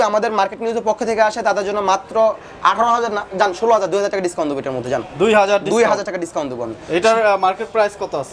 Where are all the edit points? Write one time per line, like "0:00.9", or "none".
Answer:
none

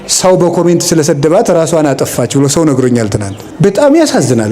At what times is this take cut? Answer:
0:03.4

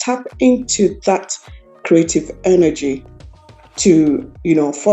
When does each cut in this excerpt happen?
none

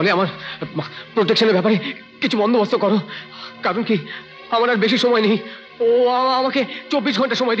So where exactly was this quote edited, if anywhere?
none

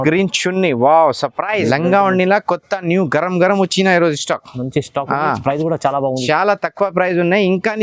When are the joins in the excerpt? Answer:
0:01.6

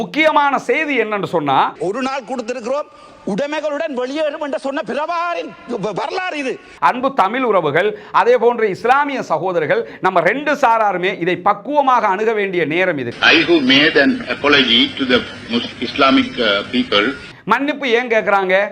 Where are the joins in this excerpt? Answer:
0:06.7
0:13.1
0:17.3

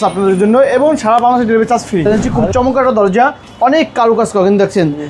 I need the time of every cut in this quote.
0:02.0

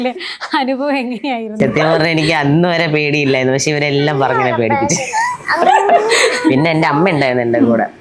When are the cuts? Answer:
none

